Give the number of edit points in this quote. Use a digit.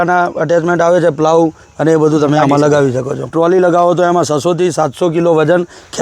1